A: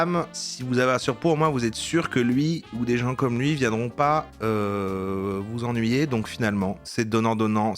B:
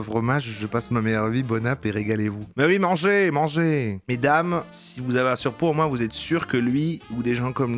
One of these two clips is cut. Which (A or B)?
A